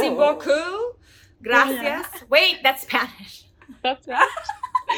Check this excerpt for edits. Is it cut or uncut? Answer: uncut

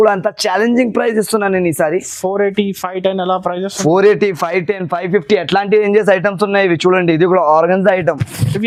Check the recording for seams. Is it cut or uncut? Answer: uncut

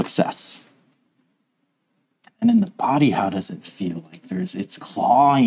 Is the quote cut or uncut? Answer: uncut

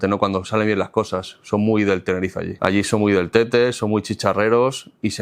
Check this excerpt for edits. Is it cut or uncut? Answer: cut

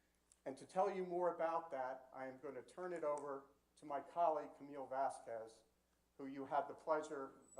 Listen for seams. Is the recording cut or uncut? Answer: uncut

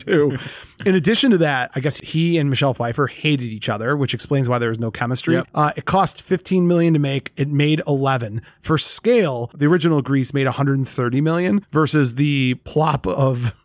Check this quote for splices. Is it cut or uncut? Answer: cut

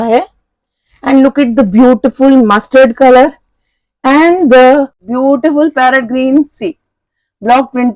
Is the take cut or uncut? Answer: cut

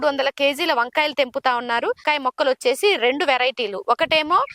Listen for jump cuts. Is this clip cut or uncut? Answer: cut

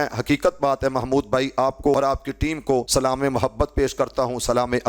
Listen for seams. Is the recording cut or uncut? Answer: cut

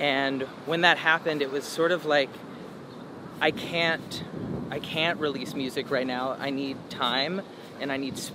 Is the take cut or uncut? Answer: uncut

